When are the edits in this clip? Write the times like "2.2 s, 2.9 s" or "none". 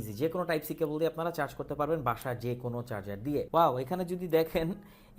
3.5 s